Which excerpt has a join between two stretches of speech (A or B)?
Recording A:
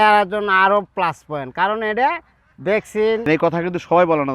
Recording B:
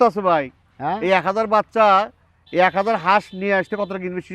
A